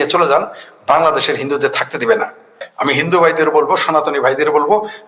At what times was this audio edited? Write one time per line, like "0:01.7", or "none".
0:02.6